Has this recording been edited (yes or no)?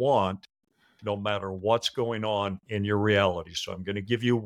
no